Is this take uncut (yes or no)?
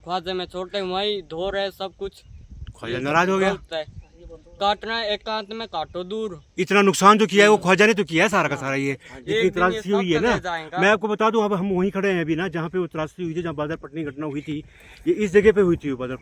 yes